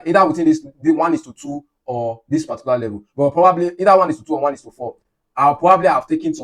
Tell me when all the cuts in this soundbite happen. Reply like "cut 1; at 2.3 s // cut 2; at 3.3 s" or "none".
none